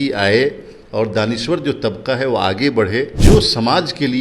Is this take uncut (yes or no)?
no